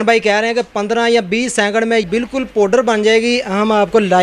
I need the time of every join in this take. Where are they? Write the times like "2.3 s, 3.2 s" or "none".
2.0 s